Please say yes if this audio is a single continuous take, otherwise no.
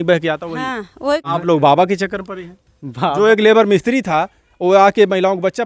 no